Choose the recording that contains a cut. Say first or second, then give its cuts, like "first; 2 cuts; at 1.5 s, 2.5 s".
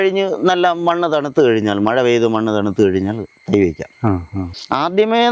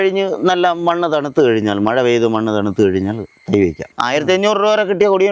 second; 1 cut; at 3.9 s